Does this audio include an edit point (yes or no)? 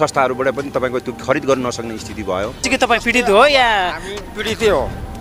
yes